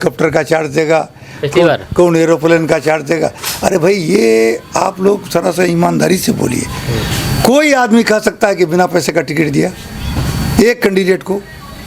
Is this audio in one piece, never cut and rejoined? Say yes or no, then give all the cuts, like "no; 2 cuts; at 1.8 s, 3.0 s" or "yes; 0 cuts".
yes; 0 cuts